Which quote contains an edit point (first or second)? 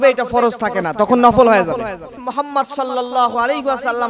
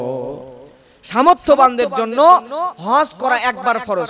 first